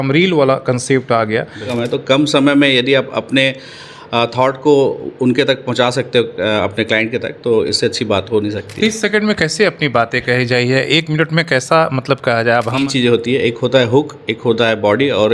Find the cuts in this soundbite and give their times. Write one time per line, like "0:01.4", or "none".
0:01.7
0:12.8

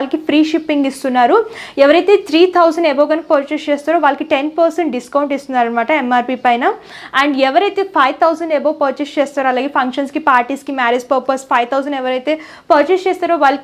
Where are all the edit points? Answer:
none

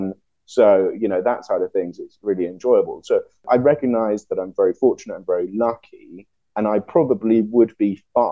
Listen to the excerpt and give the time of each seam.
0:03.4

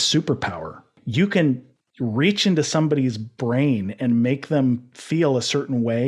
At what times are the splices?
0:00.9

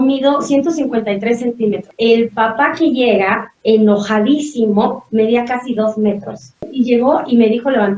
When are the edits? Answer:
0:01.9
0:06.7

